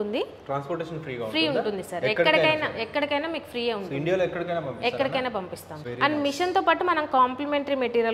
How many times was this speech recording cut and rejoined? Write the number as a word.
one